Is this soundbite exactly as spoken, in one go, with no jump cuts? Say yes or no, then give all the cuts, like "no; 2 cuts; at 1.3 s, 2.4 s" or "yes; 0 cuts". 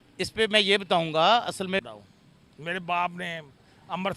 no; 1 cut; at 1.9 s